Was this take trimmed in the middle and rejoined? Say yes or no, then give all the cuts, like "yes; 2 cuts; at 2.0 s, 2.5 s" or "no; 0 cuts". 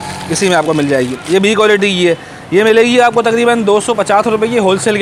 no; 0 cuts